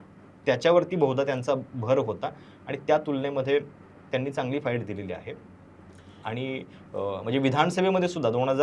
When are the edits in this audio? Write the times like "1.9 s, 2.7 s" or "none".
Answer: none